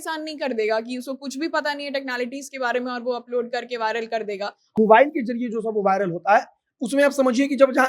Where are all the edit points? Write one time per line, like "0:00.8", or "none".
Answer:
0:04.8